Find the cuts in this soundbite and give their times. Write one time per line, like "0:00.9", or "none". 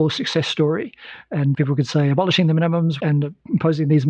0:01.5
0:03.0